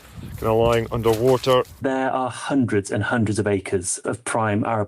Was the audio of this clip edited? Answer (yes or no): yes